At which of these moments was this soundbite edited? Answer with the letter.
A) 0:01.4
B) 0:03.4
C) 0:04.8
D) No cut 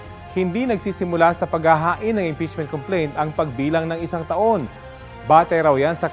C